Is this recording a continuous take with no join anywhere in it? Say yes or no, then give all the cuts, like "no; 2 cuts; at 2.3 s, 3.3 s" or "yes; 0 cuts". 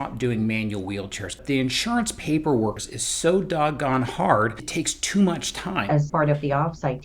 no; 4 cuts; at 1.4 s, 2.9 s, 4.6 s, 5.9 s